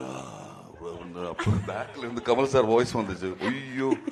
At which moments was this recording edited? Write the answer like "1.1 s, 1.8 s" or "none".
none